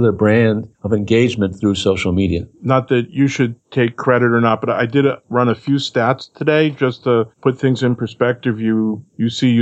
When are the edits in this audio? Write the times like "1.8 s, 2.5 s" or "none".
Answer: none